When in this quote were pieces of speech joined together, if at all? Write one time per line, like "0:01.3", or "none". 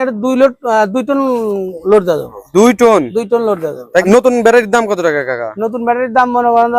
0:04.0